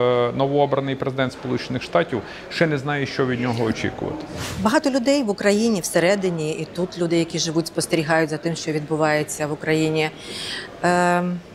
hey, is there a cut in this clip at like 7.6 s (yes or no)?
no